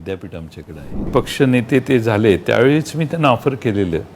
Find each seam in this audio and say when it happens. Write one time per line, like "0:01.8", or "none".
0:01.1